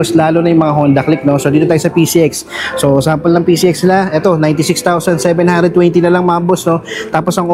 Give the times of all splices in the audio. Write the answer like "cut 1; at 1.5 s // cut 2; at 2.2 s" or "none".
none